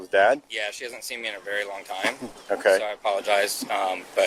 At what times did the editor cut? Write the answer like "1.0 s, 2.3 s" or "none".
none